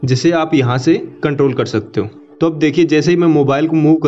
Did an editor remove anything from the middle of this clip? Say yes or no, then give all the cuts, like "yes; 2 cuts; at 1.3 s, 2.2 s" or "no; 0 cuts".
yes; 1 cut; at 2.2 s